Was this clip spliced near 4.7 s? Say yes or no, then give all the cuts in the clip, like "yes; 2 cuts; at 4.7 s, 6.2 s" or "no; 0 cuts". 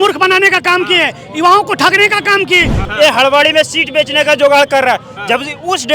no; 1 cut; at 2.9 s